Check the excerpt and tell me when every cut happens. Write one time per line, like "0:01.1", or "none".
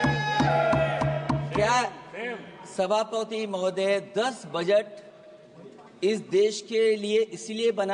none